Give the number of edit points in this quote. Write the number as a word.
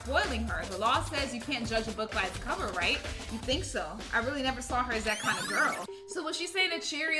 one